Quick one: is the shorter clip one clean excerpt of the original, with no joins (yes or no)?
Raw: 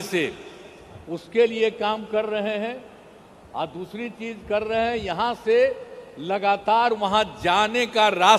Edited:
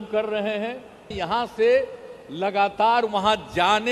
no